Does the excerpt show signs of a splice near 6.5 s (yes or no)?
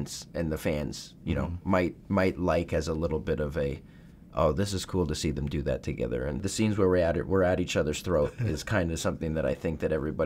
yes